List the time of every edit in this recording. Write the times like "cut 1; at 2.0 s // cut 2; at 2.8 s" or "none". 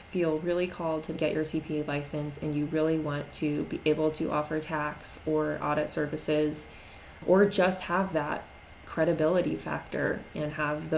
cut 1; at 1.2 s // cut 2; at 7.2 s